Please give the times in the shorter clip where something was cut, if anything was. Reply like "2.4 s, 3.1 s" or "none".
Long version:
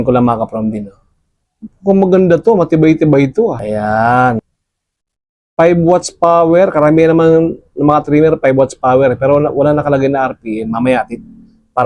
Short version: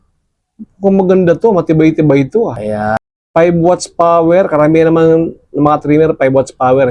3.0 s